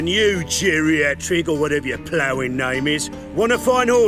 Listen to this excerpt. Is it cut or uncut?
uncut